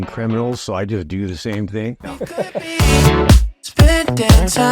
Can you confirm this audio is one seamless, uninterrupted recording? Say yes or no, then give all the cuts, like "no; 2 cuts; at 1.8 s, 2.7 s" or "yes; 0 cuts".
no; 1 cut; at 2.2 s